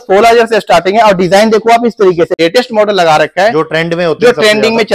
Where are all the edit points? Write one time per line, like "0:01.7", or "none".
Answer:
0:02.3